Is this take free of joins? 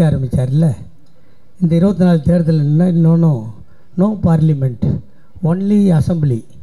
yes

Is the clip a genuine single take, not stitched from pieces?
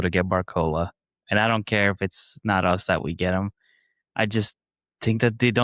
yes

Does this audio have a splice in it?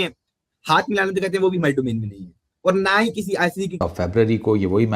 yes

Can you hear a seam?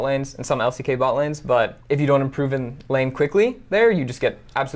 yes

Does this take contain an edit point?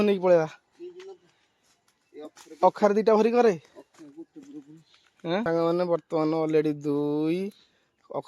yes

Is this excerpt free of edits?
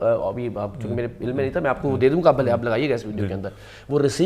yes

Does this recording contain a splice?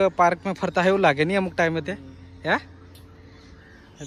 no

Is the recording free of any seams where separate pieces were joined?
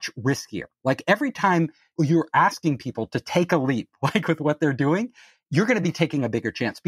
no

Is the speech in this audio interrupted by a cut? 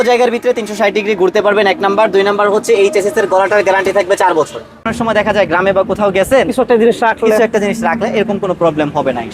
yes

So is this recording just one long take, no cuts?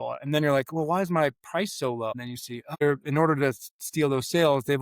no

